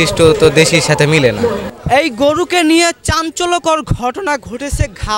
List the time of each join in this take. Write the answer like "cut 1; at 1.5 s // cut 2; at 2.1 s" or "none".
cut 1; at 1.6 s